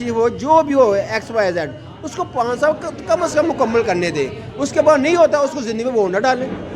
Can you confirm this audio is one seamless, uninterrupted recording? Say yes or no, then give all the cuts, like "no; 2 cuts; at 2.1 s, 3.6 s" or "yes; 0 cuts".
yes; 0 cuts